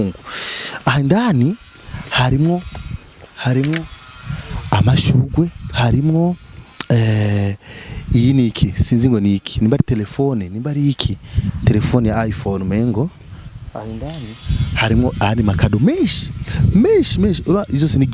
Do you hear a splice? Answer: no; 0 cuts

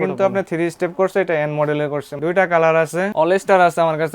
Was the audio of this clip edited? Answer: yes; 2 cuts; at 2.1 s, 3.1 s

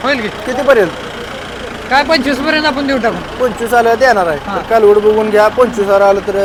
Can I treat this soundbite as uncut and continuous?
yes; 0 cuts

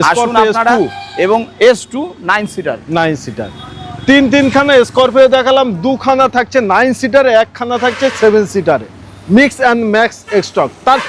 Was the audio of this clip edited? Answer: no; 0 cuts

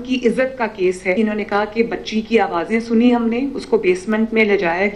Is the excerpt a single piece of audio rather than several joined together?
no; 1 cut; at 1.1 s

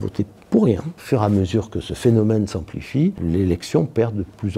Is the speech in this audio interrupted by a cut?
yes; 2 cuts; at 1.0 s, 3.2 s

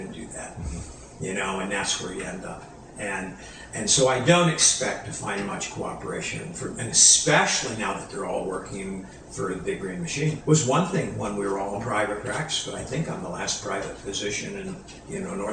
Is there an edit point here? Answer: yes; 1 cut; at 10.4 s

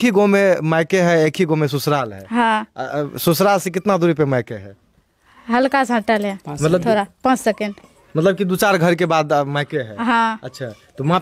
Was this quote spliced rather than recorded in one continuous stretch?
no; 0 cuts

